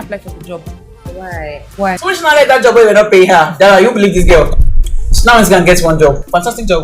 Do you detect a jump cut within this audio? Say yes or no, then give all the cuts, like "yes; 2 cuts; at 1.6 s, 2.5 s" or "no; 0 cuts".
yes; 1 cut; at 2.0 s